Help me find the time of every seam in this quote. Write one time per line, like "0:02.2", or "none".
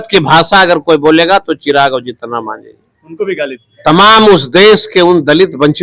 0:03.7